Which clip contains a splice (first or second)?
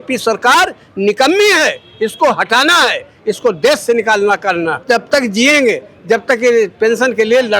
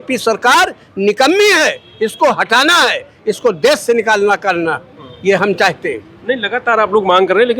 first